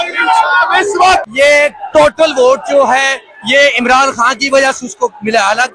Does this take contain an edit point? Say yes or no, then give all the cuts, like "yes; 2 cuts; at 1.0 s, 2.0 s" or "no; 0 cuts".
yes; 1 cut; at 1.2 s